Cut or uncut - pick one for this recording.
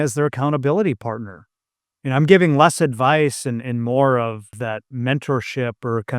cut